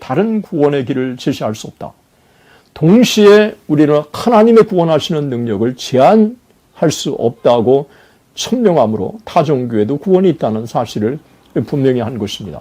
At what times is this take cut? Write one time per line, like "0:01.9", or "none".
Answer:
none